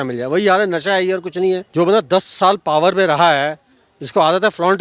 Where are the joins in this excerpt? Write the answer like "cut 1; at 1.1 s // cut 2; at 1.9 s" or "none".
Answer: cut 1; at 1.7 s